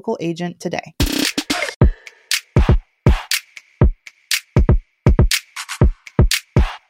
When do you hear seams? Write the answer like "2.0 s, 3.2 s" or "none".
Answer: 1.7 s